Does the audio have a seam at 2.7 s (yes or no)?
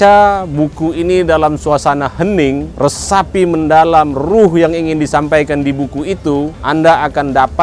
yes